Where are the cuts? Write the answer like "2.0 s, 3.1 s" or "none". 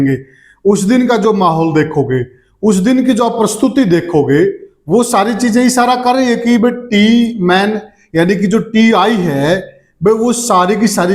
none